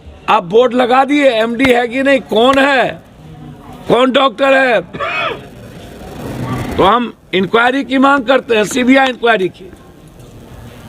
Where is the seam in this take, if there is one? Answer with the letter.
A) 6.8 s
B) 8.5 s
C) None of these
A